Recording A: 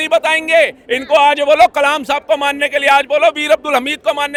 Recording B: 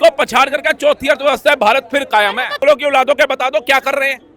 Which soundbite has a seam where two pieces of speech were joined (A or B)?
B